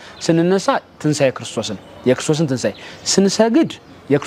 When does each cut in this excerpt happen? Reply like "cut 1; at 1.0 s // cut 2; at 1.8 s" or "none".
none